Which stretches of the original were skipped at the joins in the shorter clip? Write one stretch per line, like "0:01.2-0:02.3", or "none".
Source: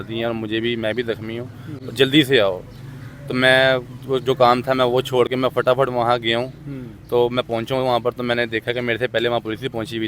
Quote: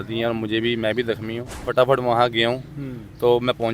0:01.7-0:05.6